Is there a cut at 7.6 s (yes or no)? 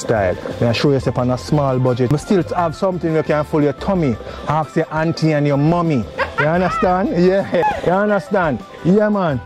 yes